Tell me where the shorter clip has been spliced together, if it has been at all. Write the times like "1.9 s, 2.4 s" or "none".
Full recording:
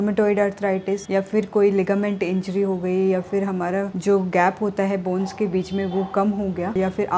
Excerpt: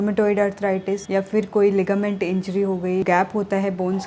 3.0 s